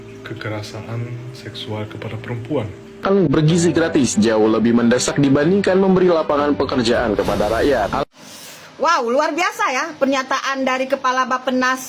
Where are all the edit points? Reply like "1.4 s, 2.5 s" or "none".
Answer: 2.8 s

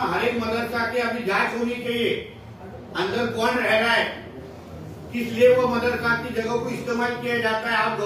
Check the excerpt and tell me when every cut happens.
none

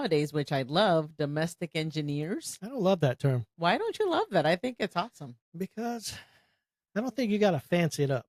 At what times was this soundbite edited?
none

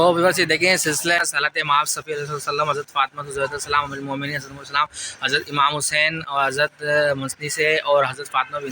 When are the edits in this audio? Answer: 1.2 s

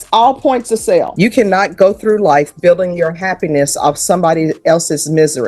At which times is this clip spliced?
1.1 s

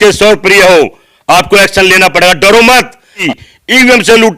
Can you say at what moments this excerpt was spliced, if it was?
3.2 s

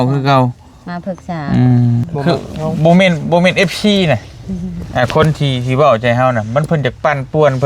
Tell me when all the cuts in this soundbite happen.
2.1 s

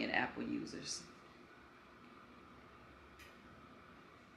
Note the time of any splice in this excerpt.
none

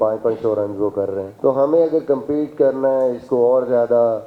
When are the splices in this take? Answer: 1.3 s

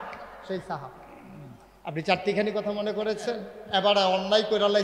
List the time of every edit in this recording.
3.5 s

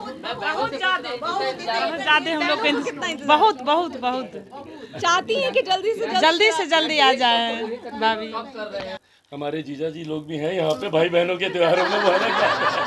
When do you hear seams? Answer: 9.0 s

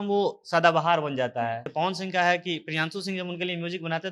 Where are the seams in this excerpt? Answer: 1.7 s

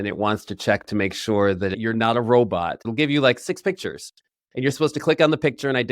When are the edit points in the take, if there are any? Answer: 1.7 s, 2.8 s, 4.4 s

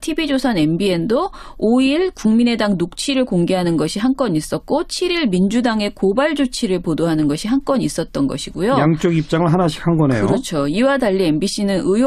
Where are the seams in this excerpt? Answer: 1.7 s

